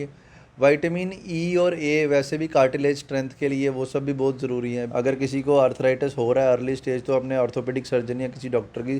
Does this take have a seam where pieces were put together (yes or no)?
yes